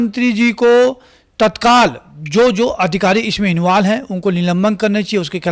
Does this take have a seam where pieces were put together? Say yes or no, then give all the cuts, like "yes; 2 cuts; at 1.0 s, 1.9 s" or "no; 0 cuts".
no; 0 cuts